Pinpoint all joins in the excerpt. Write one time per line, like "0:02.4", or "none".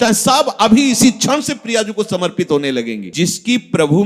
0:03.1